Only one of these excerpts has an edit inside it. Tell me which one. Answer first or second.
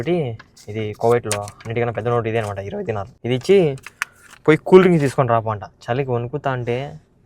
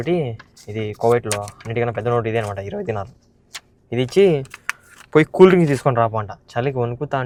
first